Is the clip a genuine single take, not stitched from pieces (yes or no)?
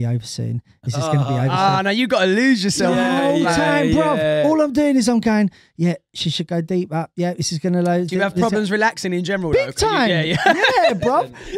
yes